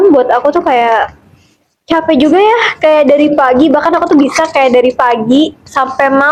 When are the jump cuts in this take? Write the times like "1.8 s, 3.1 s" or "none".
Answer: none